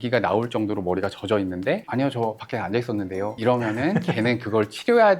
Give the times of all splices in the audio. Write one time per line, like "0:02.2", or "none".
0:01.9
0:03.3